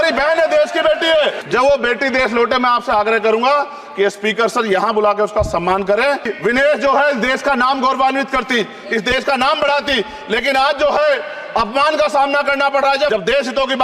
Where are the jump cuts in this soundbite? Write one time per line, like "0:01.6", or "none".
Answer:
0:01.4
0:06.3
0:13.1